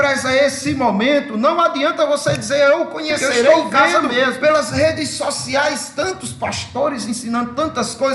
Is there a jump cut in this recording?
yes; 1 cut; at 4.4 s

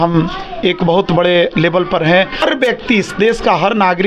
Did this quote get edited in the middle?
yes; 1 cut; at 2.4 s

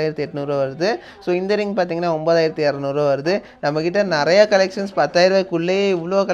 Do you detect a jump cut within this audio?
no; 0 cuts

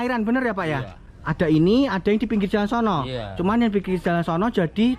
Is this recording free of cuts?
yes; 0 cuts

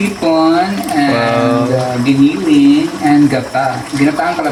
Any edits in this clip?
no; 0 cuts

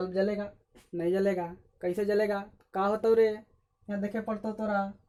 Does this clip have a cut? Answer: no; 0 cuts

